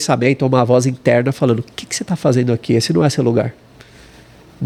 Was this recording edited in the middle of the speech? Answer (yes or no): no